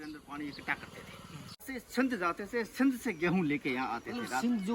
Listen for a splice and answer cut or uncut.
cut